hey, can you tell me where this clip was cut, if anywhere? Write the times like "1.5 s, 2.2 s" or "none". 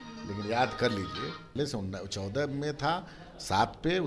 1.5 s